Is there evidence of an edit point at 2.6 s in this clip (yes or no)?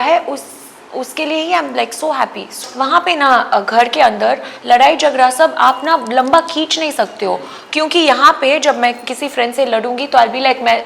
yes